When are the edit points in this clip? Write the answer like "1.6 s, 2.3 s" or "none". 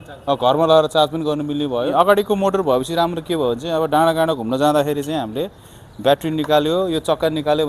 1.9 s